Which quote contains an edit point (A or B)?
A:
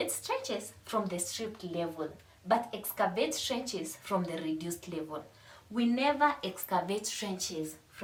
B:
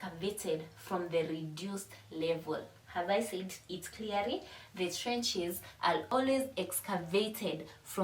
B